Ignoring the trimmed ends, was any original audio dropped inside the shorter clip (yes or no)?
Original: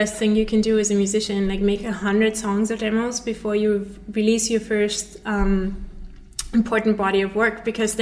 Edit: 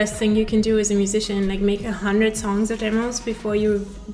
no